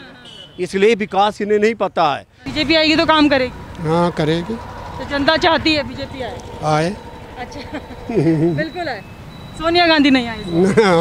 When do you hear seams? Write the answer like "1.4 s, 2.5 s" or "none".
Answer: 2.4 s